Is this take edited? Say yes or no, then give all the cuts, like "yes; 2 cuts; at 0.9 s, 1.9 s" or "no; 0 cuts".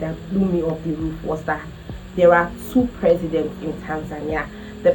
no; 0 cuts